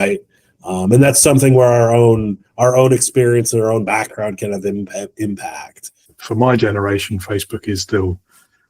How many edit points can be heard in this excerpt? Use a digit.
1